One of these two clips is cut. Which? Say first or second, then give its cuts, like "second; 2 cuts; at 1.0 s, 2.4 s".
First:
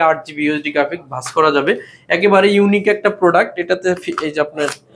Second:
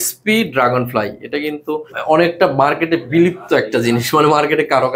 second; 1 cut; at 1.9 s